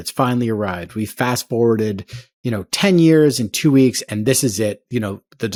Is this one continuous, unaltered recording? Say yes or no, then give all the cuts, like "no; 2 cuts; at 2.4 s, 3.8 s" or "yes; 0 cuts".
yes; 0 cuts